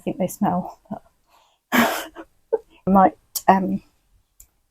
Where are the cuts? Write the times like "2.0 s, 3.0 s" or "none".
2.8 s

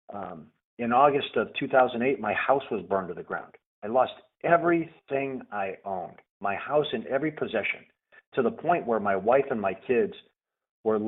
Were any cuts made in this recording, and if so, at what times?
none

